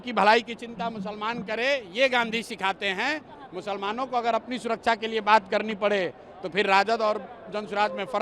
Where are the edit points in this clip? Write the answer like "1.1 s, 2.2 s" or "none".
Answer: none